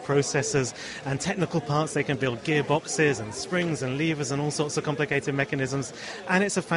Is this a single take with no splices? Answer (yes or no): yes